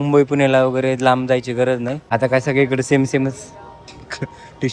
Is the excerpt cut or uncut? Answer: cut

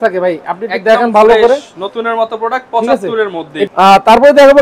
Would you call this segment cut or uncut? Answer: cut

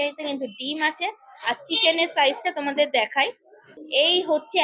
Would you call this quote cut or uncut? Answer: uncut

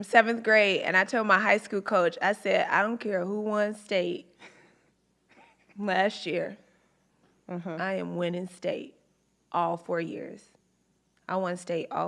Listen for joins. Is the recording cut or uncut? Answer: cut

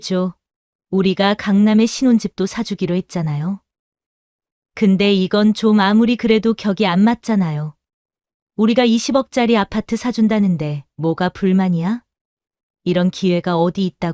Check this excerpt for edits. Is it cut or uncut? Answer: uncut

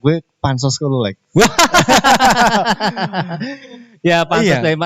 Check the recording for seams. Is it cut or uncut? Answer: uncut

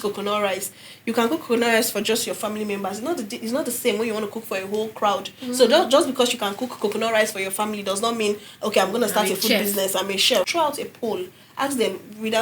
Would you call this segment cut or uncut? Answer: cut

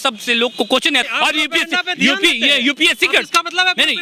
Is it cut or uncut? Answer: cut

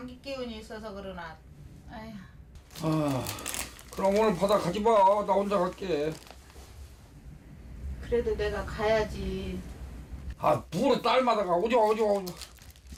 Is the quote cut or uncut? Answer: uncut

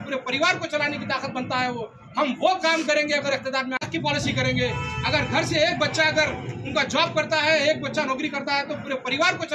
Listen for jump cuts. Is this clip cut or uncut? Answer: uncut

